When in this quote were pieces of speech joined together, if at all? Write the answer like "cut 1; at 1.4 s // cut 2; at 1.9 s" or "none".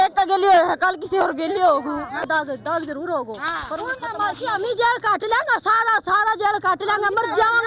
cut 1; at 2.2 s